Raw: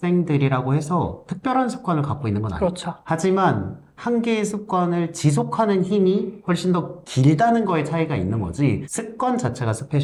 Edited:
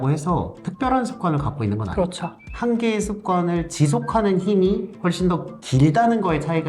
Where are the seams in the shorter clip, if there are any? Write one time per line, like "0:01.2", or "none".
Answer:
0:02.3